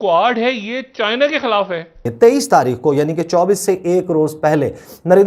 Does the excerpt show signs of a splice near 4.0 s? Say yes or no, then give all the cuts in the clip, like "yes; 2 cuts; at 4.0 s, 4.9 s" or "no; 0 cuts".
no; 1 cut; at 2.1 s